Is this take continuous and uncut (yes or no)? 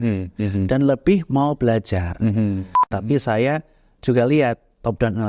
no